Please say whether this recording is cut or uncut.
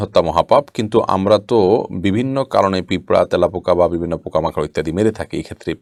uncut